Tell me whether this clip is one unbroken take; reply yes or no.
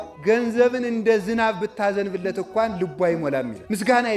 yes